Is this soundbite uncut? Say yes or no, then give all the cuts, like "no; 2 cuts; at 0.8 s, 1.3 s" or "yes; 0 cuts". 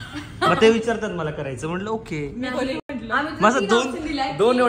yes; 0 cuts